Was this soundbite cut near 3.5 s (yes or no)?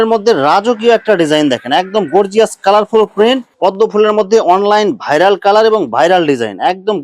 yes